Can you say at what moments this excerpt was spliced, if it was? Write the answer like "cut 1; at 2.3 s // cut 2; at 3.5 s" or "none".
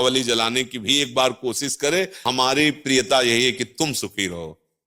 cut 1; at 2.2 s